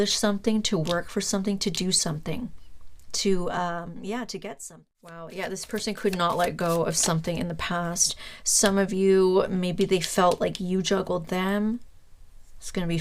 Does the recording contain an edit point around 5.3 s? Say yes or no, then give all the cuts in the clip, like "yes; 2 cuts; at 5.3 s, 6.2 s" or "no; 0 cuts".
yes; 1 cut; at 5.3 s